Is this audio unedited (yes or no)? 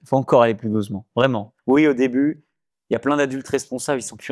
no